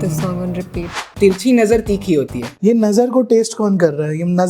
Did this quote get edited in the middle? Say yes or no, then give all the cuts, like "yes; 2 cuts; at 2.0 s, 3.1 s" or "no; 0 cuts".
yes; 2 cuts; at 1.1 s, 2.4 s